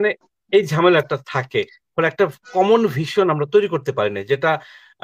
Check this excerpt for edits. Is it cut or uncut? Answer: uncut